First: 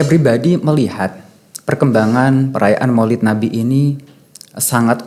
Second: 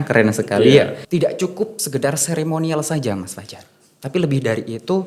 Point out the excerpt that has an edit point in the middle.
second; 1 cut; at 1.0 s

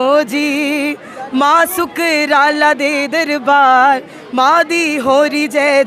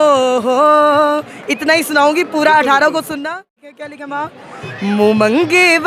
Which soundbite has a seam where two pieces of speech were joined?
second; 1 cut; at 3.5 s

